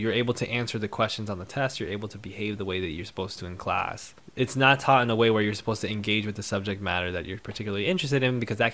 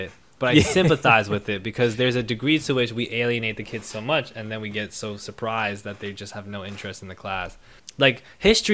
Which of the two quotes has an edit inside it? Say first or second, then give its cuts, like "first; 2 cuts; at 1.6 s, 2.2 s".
second; 1 cut; at 7.8 s